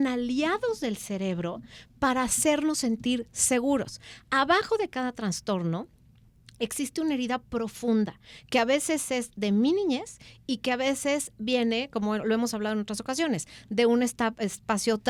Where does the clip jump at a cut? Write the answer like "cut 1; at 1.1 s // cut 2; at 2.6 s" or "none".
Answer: none